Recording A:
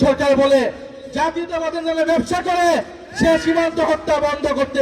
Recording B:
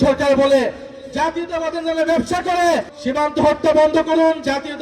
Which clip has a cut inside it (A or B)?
B